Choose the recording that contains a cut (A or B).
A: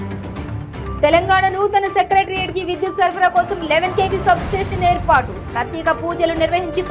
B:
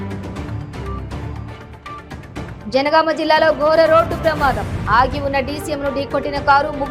A